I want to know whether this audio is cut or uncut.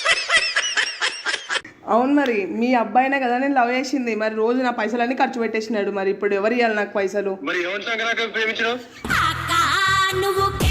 cut